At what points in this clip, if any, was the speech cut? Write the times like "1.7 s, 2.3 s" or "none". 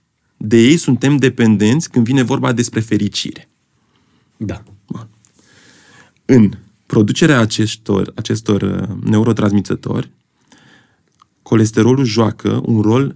none